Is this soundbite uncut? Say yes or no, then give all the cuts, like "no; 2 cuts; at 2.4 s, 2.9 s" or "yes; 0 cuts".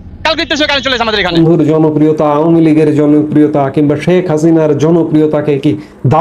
no; 1 cut; at 1.3 s